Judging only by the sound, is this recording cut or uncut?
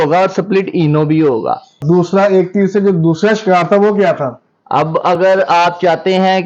cut